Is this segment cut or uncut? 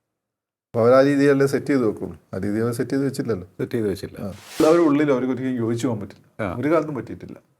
cut